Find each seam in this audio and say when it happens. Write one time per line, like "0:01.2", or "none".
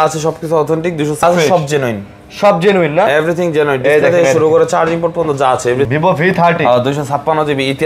0:01.2
0:05.9